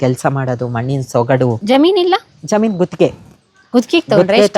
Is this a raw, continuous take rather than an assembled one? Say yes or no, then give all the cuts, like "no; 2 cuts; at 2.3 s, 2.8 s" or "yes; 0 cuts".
no; 1 cut; at 1.6 s